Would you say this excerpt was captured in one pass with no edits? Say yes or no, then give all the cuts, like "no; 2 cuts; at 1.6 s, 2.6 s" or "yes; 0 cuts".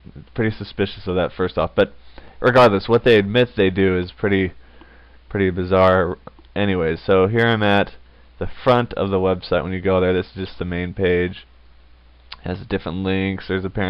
no; 1 cut; at 3.0 s